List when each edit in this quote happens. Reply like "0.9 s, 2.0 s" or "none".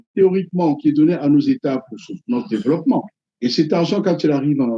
3.2 s